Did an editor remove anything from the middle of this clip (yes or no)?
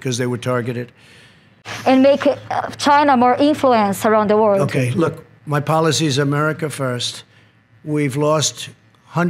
yes